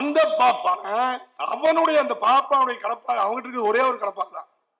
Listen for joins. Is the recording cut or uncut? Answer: uncut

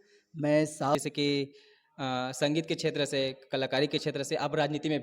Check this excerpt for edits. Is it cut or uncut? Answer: cut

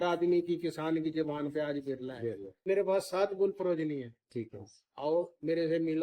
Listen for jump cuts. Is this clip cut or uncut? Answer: cut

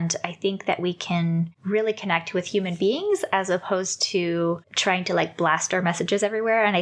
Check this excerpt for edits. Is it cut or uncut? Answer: cut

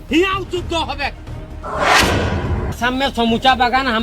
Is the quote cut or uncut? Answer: cut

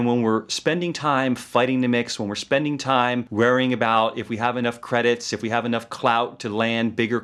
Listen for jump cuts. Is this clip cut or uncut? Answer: uncut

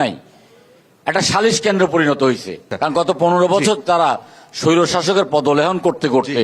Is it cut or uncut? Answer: cut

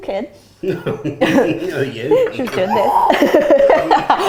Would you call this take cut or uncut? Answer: uncut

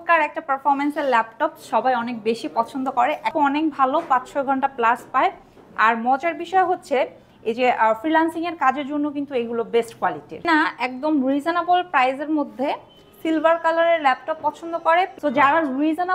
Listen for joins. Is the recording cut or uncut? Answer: cut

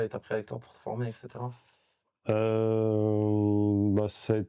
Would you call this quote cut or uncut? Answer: uncut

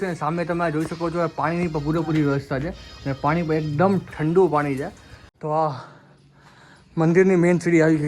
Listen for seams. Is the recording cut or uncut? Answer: cut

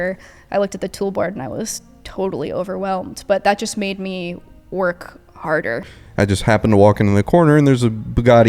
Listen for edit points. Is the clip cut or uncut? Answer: cut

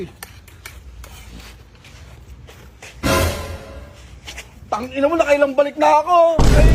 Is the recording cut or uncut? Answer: uncut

